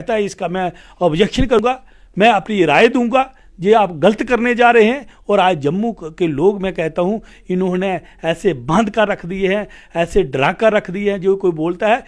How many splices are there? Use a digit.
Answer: 1